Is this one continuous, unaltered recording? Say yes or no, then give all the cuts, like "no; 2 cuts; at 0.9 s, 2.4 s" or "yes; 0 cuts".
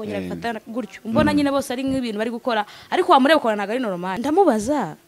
no; 1 cut; at 4.2 s